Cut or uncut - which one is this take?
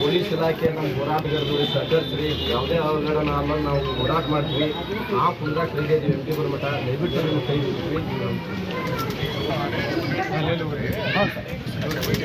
uncut